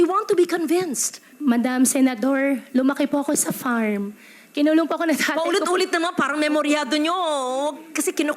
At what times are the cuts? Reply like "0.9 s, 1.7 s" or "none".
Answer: 1.3 s